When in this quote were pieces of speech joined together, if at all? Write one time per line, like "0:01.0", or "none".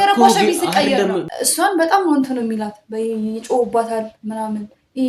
0:01.3